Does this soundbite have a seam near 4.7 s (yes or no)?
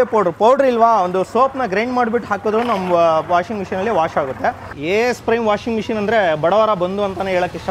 yes